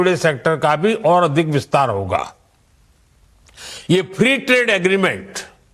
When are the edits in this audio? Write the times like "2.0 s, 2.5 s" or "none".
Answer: 4.1 s